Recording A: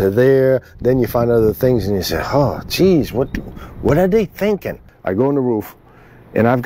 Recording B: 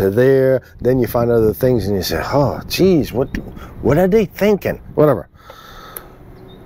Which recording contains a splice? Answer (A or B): A